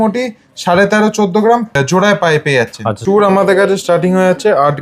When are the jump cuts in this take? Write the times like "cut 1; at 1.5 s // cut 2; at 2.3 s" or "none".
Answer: cut 1; at 1.7 s // cut 2; at 3.0 s